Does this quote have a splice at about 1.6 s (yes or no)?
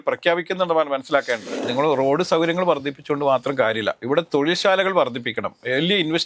yes